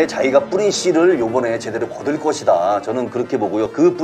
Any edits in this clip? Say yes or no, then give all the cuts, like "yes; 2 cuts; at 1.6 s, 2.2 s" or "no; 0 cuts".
no; 0 cuts